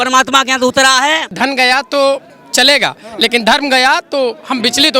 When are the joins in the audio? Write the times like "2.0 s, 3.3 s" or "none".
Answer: 1.3 s